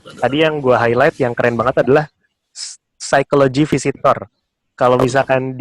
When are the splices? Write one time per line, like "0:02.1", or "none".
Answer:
none